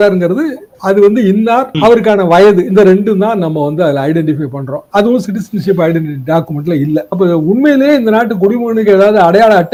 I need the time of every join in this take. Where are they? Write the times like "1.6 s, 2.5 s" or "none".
none